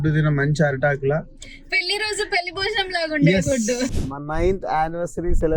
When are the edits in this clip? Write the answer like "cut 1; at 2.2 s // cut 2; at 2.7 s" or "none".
cut 1; at 3.9 s

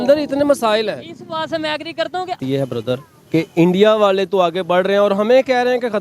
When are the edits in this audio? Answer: cut 1; at 2.4 s

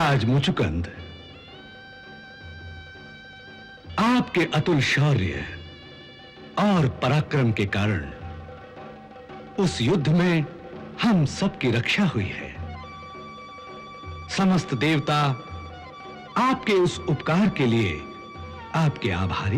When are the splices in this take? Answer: none

